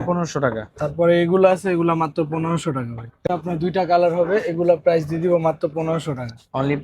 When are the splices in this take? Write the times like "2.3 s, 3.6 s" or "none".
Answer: 3.3 s